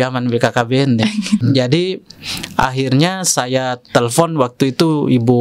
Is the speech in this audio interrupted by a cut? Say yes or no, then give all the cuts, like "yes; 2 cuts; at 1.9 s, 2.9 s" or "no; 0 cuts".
no; 0 cuts